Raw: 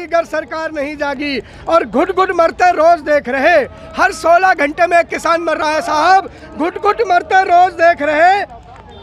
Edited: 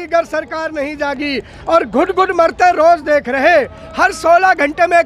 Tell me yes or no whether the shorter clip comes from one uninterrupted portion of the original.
yes